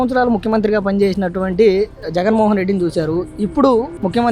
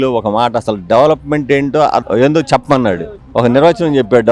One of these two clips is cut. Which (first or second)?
second